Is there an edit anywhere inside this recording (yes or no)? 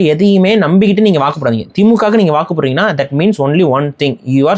no